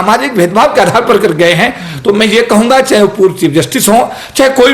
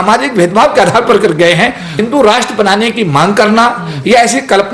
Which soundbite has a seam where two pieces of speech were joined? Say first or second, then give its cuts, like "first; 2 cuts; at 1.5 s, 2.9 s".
second; 1 cut; at 2.0 s